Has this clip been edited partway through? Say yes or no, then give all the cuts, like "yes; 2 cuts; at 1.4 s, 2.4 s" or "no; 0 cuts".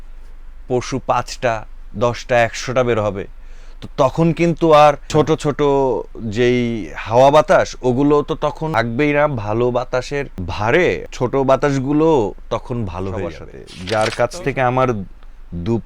yes; 5 cuts; at 5.0 s, 8.6 s, 10.4 s, 11.1 s, 13.4 s